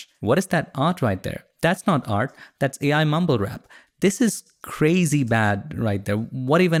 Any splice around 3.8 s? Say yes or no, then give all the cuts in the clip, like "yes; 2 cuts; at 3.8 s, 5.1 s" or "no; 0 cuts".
no; 0 cuts